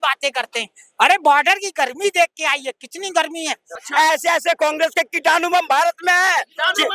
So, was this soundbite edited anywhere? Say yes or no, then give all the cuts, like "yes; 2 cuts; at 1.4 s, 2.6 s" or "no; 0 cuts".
yes; 1 cut; at 3.8 s